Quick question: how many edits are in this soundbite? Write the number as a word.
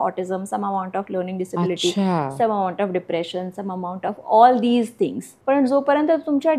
one